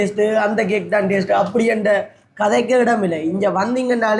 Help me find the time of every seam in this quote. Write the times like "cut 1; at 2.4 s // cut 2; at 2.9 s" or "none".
none

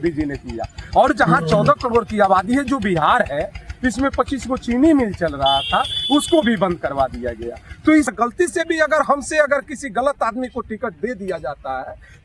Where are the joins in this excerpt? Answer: cut 1; at 8.1 s

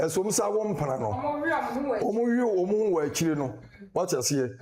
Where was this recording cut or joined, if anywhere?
none

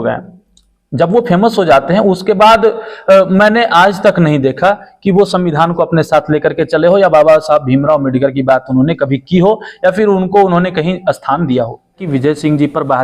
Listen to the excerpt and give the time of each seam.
cut 1; at 12.0 s

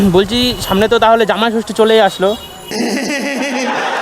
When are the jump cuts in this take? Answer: cut 1; at 2.6 s

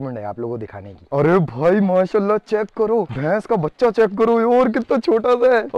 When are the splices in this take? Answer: none

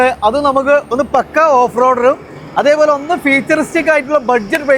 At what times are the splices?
none

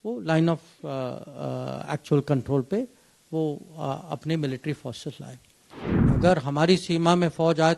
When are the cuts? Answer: cut 1; at 6.1 s

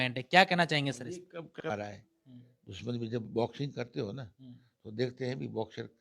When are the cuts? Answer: cut 1; at 1.6 s

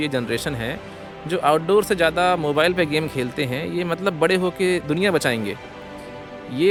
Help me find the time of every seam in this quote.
none

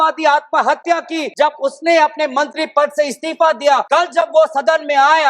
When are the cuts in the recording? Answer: cut 1; at 1.3 s // cut 2; at 3.8 s

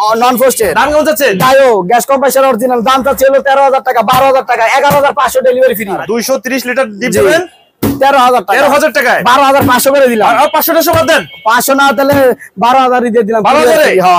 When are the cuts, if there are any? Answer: cut 1; at 6.0 s

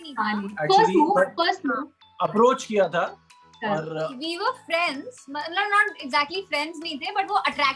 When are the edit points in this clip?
none

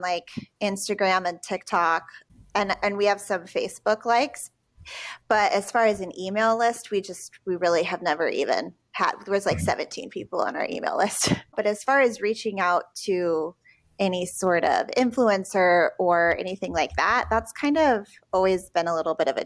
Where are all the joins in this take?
cut 1; at 2.1 s // cut 2; at 11.5 s

